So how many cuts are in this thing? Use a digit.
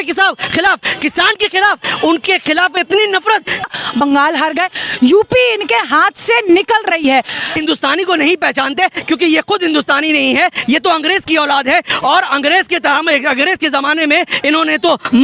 2